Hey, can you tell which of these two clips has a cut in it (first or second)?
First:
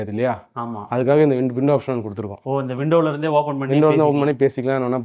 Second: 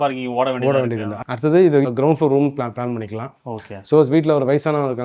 second